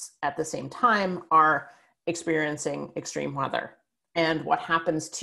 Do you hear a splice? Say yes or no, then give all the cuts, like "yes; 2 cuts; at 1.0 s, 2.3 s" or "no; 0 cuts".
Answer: no; 0 cuts